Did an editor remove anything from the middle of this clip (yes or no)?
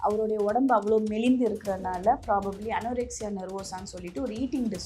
no